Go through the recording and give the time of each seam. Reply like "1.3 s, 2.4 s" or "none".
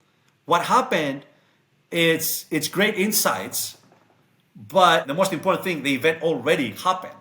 5.1 s